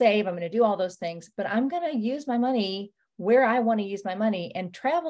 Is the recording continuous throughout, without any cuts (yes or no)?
yes